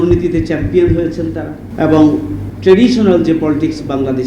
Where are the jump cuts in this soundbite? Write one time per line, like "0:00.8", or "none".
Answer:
0:01.6
0:02.4